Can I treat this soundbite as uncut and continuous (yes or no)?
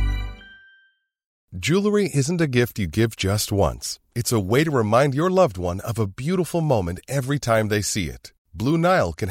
no